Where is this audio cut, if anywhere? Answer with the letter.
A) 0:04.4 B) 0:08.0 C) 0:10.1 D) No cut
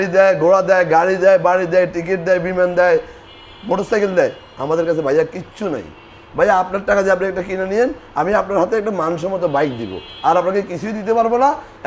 D